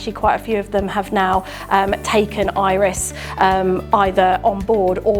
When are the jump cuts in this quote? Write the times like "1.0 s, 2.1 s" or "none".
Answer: none